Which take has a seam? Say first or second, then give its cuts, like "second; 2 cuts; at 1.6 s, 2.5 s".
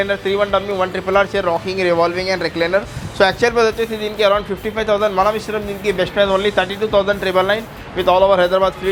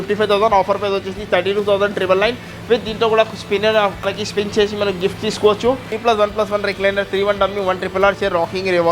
second; 2 cuts; at 4.2 s, 5.9 s